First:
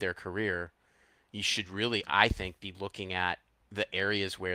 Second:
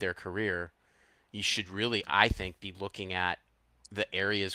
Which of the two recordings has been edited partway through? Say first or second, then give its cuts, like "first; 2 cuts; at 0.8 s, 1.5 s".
first; 1 cut; at 3.6 s